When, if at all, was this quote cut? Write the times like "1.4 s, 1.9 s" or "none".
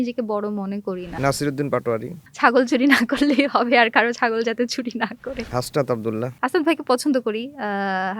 1.1 s, 2.2 s, 5.5 s, 6.3 s